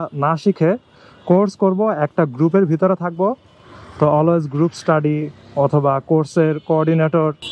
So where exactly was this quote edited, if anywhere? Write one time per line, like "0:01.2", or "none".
none